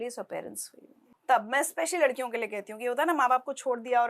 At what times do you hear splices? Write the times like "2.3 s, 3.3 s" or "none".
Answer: 1.0 s